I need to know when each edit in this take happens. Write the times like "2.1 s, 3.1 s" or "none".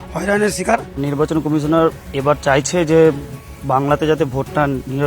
0.9 s